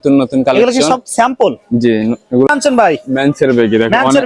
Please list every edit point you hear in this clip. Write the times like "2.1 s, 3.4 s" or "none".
2.5 s